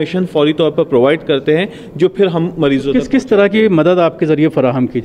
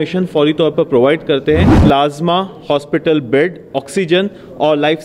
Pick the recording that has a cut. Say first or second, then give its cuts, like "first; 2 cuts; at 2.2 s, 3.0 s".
second; 1 cut; at 1.7 s